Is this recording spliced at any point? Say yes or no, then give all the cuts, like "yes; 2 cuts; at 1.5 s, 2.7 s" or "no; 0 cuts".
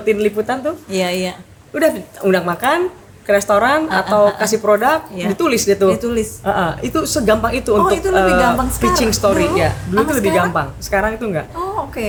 no; 0 cuts